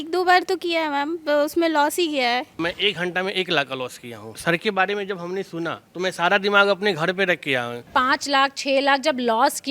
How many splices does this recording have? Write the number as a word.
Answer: three